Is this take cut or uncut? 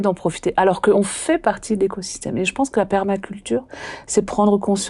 cut